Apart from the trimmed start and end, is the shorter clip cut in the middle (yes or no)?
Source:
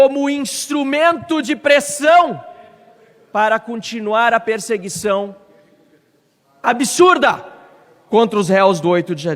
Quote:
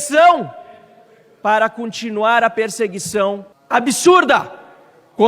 yes